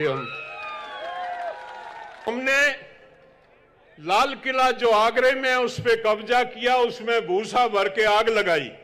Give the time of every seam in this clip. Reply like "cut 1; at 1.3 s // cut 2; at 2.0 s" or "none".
cut 1; at 2.3 s